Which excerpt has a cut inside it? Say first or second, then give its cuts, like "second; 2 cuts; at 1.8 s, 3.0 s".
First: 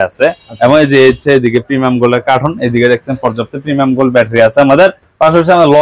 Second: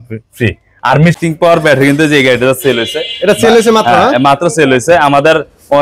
second; 1 cut; at 1.2 s